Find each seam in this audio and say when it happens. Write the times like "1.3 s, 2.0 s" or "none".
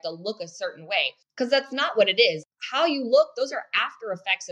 1.2 s, 2.4 s